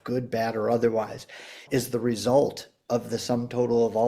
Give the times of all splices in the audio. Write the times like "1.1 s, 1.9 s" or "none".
1.6 s